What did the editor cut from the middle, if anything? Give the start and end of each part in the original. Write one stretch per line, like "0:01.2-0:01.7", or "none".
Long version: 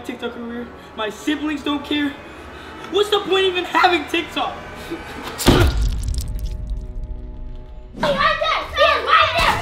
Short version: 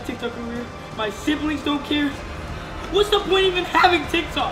none